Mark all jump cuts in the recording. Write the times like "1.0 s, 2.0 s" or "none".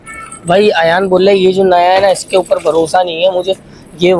none